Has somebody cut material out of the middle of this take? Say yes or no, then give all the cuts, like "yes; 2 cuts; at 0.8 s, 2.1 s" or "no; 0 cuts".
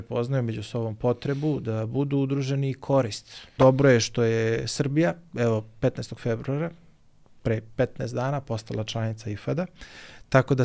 yes; 1 cut; at 3.5 s